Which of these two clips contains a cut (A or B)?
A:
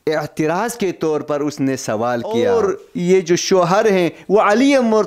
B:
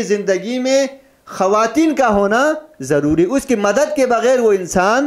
A